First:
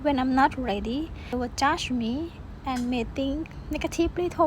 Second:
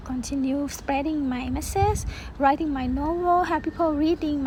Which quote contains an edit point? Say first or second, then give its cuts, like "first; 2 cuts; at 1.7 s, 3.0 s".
first; 1 cut; at 1.3 s